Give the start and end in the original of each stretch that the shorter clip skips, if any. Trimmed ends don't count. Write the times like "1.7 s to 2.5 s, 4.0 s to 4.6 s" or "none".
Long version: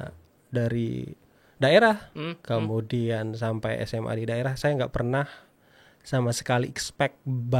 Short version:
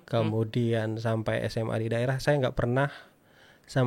none